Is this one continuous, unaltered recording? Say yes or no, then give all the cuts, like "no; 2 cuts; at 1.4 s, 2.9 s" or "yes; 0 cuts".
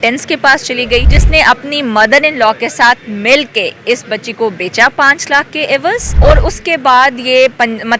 no; 2 cuts; at 1.2 s, 6.1 s